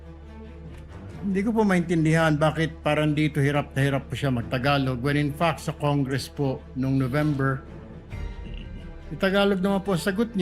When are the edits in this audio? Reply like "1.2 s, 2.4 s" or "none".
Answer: 1.0 s